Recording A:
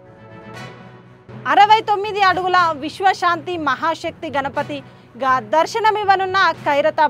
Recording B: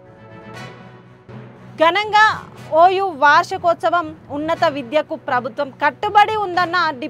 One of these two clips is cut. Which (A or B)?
B